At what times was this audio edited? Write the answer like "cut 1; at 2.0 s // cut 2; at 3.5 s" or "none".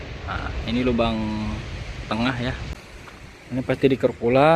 cut 1; at 2.7 s

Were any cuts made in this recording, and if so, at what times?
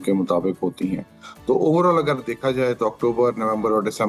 none

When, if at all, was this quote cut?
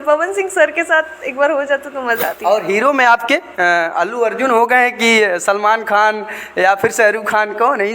cut 1; at 2.3 s

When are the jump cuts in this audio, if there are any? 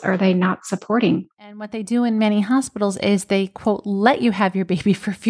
cut 1; at 1.8 s

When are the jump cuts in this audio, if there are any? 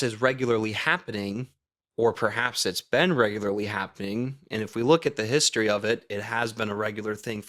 none

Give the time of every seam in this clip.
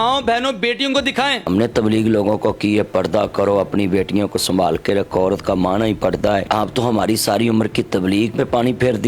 cut 1; at 1.5 s // cut 2; at 6.5 s // cut 3; at 8.3 s

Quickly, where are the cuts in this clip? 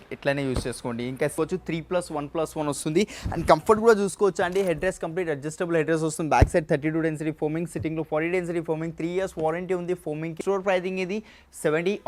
cut 1; at 1.3 s // cut 2; at 10.3 s

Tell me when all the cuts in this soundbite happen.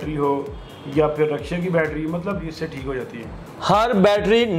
cut 1; at 2.5 s

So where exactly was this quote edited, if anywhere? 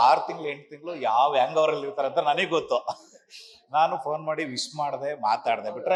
none

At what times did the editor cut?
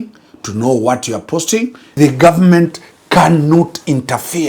cut 1; at 1.9 s

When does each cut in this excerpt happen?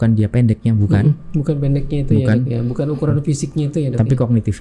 none

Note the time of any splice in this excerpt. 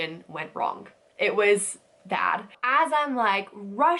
cut 1; at 2.5 s

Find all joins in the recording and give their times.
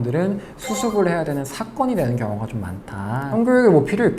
cut 1; at 3.3 s

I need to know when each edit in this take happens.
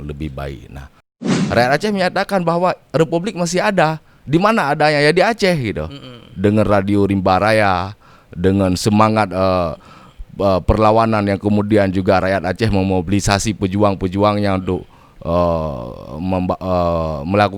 cut 1; at 1.3 s

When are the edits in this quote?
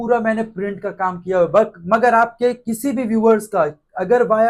none

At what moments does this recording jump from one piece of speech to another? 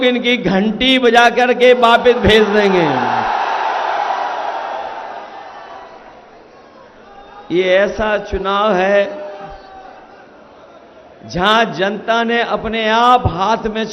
none

